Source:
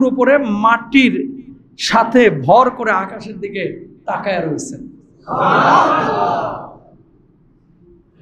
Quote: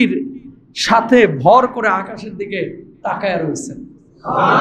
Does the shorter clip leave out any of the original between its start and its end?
no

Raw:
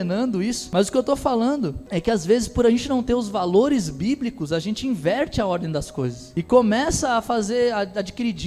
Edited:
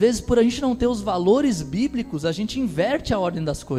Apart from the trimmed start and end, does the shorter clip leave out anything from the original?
no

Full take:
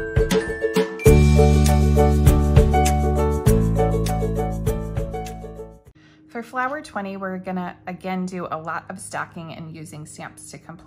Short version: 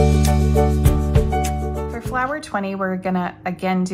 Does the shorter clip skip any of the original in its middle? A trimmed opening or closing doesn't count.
yes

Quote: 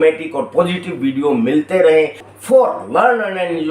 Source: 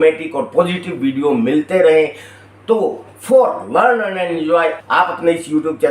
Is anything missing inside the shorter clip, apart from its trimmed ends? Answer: yes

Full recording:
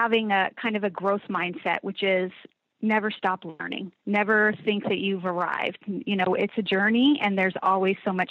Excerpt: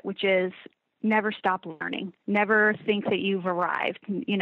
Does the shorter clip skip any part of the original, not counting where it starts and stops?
no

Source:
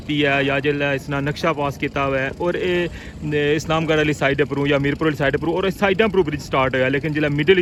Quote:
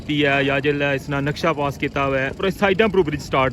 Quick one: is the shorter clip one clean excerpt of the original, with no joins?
no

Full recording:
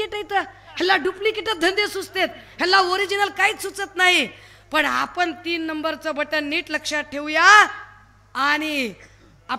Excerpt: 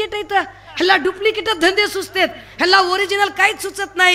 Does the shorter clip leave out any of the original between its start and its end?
no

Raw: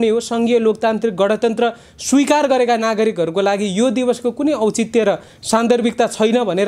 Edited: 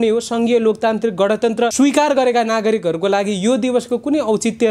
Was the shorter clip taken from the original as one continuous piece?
no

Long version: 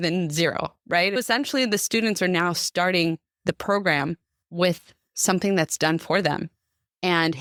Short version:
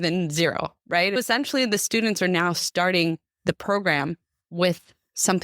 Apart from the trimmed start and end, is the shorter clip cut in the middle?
no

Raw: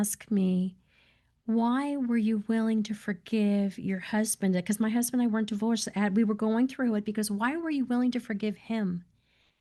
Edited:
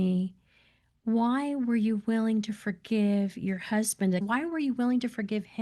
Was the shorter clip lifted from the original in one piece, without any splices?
no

